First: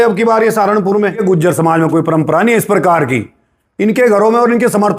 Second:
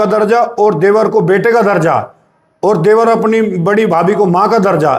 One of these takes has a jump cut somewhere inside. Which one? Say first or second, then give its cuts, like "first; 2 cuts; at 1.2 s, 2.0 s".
first; 1 cut; at 1.2 s